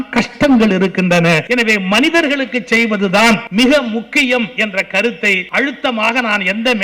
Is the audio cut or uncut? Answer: cut